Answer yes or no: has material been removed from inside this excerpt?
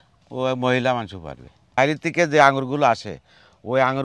yes